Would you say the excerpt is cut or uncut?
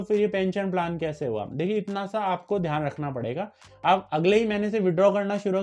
cut